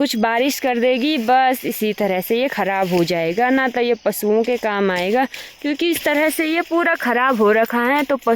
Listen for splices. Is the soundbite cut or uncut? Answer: uncut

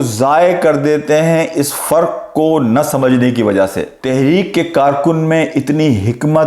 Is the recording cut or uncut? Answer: cut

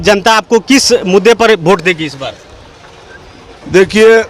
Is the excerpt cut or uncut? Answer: uncut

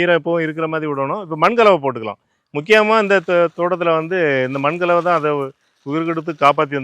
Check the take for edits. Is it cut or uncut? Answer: uncut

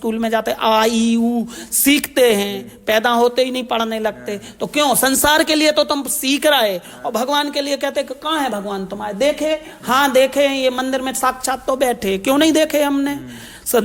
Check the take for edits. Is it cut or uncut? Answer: uncut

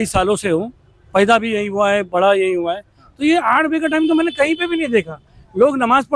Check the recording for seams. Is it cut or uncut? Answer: uncut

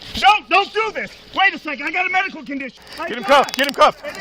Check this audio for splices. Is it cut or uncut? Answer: cut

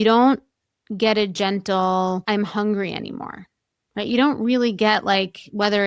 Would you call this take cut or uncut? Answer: cut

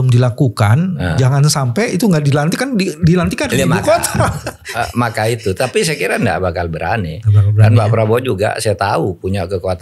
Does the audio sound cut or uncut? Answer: uncut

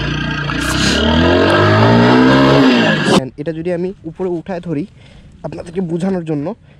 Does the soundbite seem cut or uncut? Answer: cut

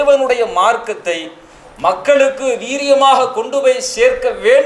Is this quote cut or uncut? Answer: uncut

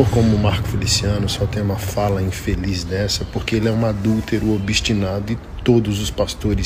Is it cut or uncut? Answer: uncut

